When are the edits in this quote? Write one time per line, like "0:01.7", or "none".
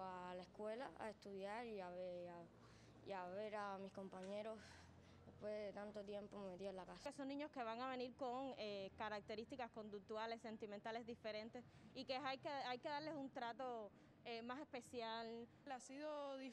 0:07.0
0:15.6